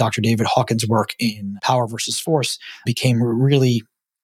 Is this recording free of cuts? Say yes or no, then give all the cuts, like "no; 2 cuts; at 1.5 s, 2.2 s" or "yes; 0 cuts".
no; 2 cuts; at 1.5 s, 2.9 s